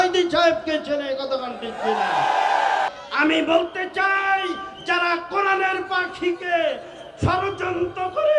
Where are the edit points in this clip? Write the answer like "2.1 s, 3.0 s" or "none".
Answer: 2.9 s